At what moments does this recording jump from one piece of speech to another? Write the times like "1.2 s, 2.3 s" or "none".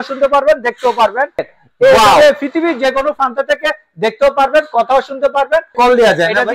1.5 s, 5.7 s